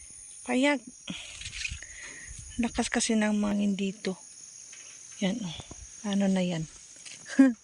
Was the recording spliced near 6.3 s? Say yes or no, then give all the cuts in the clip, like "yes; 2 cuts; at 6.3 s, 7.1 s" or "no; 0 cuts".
no; 1 cut; at 3.5 s